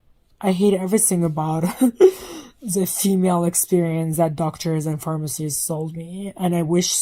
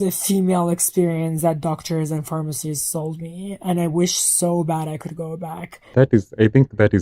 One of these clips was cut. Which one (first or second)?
second